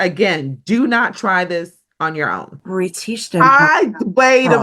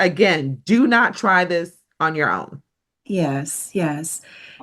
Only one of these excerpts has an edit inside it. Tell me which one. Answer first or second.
first